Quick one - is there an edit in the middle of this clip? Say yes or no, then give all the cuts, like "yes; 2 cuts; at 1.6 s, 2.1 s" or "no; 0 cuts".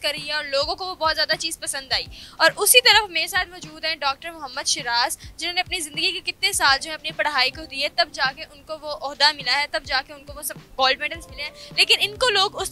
no; 0 cuts